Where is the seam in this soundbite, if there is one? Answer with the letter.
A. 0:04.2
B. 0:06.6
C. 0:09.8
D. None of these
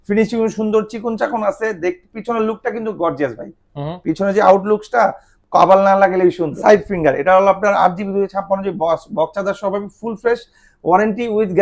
B